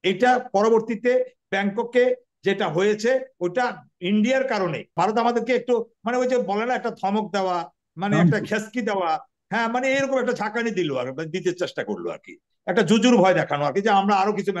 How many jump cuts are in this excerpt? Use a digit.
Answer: 1